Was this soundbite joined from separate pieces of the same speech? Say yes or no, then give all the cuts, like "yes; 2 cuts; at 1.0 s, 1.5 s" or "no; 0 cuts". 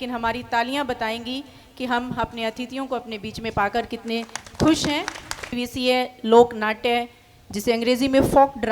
yes; 1 cut; at 5.5 s